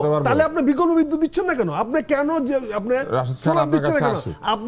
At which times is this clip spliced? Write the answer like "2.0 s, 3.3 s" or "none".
none